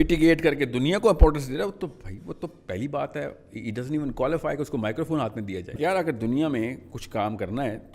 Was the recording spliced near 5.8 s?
yes; 1 cut; at 5.8 s

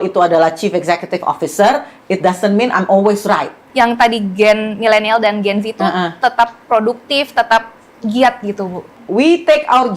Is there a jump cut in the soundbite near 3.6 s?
yes; 2 cuts; at 3.6 s, 9.0 s

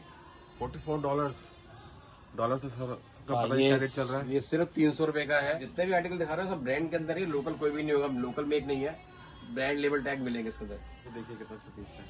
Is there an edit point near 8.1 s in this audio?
no; 2 cuts; at 5.7 s, 11.2 s

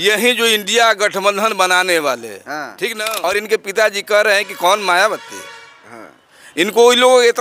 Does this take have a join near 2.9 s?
yes; 1 cut; at 2.9 s

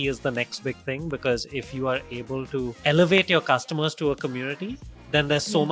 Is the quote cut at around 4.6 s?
no; 1 cut; at 2.8 s

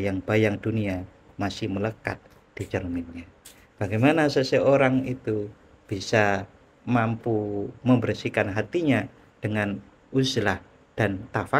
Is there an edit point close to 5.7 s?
no; 0 cuts

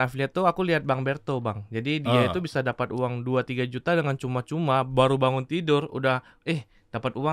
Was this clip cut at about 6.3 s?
no; 0 cuts

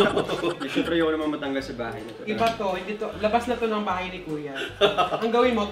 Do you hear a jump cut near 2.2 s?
yes; 1 cut; at 2.2 s

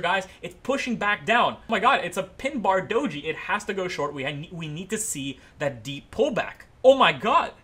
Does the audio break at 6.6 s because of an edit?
yes; 2 cuts; at 1.6 s, 6.6 s

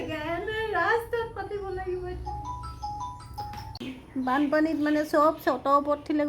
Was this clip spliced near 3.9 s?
yes; 1 cut; at 3.9 s

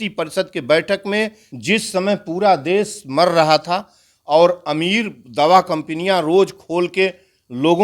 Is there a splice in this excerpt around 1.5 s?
yes; 1 cut; at 1.5 s

